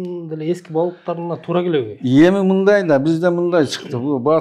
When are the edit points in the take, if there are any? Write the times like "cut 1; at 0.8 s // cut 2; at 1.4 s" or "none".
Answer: none